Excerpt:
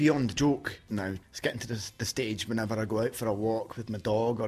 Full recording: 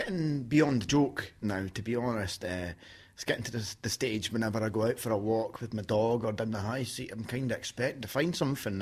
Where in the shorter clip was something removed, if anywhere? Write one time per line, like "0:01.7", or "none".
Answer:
0:01.2